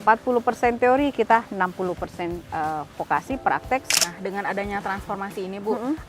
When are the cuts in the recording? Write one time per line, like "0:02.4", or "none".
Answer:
0:03.9